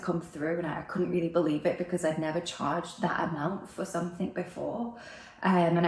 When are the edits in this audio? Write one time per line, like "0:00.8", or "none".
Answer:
none